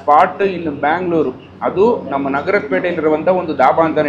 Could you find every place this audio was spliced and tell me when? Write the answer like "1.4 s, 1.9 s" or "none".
none